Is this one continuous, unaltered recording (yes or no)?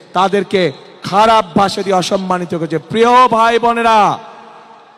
yes